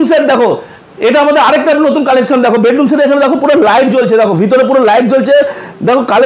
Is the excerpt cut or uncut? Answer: uncut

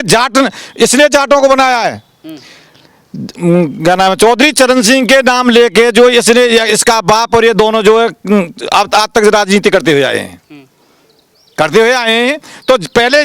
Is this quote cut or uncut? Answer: uncut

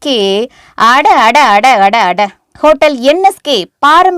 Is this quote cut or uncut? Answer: cut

